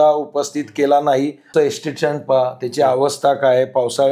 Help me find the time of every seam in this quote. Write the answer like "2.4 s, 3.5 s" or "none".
1.5 s